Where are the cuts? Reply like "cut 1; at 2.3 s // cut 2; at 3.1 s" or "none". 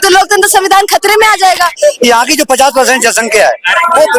cut 1; at 1.8 s